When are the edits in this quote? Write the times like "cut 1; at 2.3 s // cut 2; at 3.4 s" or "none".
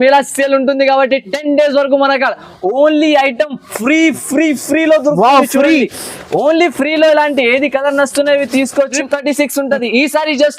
cut 1; at 8.9 s